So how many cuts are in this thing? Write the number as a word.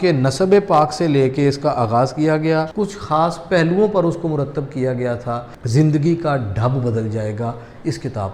two